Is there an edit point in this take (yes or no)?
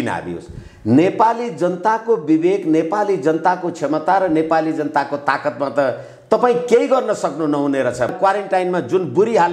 yes